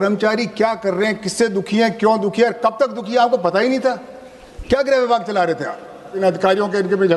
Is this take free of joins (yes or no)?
no